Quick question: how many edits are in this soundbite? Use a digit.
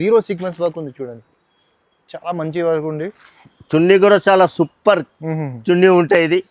0